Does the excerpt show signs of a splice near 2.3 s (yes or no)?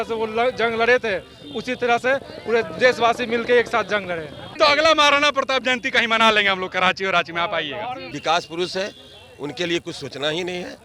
no